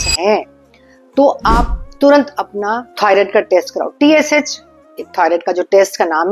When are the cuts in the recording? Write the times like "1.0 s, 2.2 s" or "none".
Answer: 2.9 s